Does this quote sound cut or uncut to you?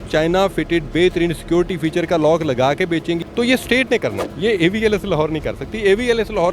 cut